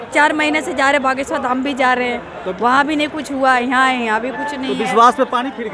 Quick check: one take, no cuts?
yes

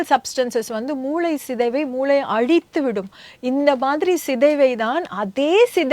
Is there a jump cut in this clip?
no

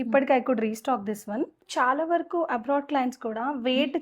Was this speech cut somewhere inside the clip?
yes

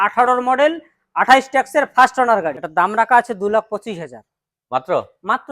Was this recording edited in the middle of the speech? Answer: yes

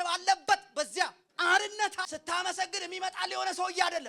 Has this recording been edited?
yes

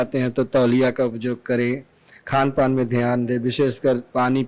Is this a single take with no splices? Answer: yes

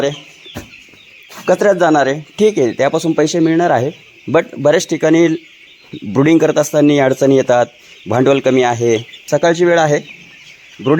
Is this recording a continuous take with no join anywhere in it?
no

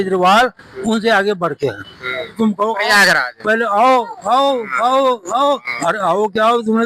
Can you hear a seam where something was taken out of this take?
yes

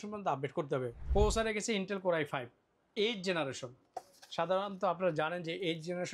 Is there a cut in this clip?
yes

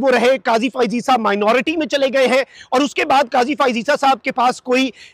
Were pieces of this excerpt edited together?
no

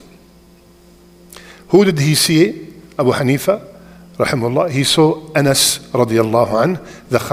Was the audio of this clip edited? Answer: no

